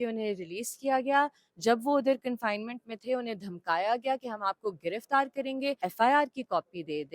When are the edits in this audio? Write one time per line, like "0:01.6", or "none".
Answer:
0:05.8